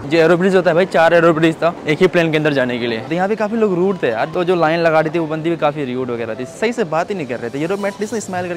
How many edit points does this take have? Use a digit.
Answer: 3